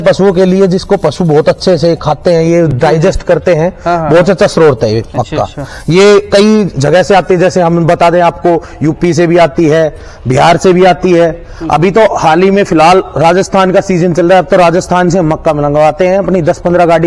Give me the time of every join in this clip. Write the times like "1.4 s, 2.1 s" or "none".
none